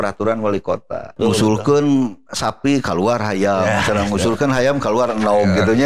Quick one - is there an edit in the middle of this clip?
yes; 1 cut; at 1.1 s

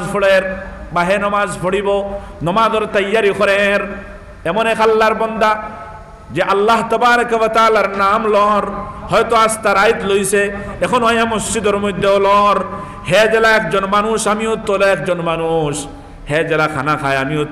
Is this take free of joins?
yes; 0 cuts

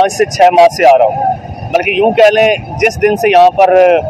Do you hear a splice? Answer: no; 0 cuts

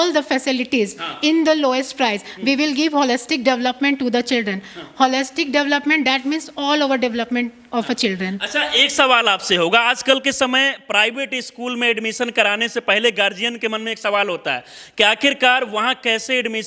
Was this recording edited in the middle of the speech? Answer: no; 0 cuts

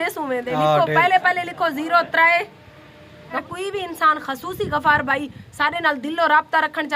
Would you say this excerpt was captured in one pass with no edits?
no; 1 cut; at 3.4 s

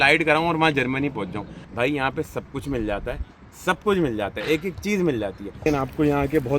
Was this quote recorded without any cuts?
no; 2 cuts; at 1.6 s, 5.7 s

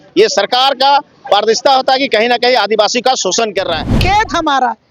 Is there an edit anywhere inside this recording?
yes; 1 cut; at 4.0 s

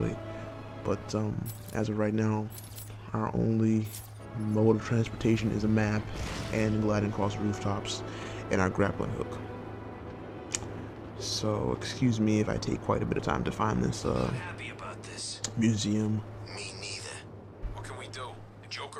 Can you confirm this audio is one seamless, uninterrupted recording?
yes; 0 cuts

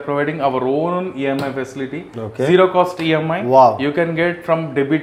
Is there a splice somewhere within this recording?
no; 0 cuts

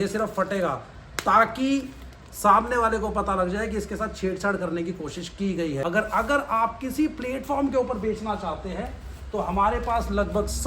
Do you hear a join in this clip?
yes; 1 cut; at 5.8 s

